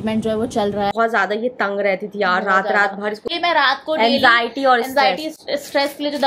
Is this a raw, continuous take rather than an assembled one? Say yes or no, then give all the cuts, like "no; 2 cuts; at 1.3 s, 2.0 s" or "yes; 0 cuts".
no; 2 cuts; at 0.9 s, 3.3 s